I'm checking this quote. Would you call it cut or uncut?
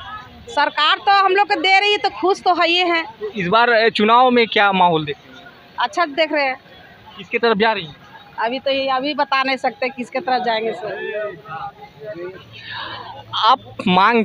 uncut